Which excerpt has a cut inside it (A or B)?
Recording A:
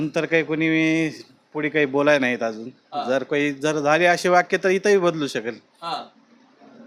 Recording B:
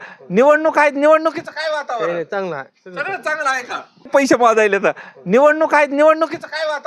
B